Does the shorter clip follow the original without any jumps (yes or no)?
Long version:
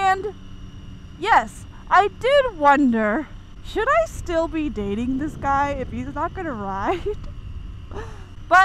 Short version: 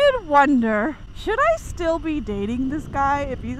no